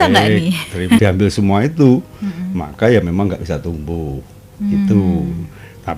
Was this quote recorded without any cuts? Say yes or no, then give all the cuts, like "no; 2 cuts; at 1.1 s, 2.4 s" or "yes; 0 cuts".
no; 1 cut; at 1.0 s